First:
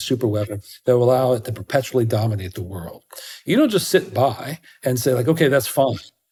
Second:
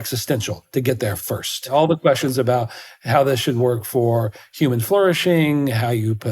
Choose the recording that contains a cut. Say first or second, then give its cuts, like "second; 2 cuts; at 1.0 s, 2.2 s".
second; 1 cut; at 1.7 s